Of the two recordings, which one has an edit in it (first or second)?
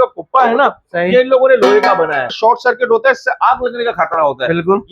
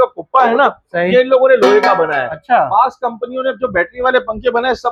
first